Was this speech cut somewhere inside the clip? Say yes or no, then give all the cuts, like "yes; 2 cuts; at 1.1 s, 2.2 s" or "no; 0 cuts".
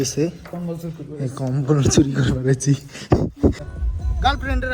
yes; 1 cut; at 3.6 s